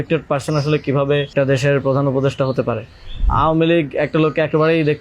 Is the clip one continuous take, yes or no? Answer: no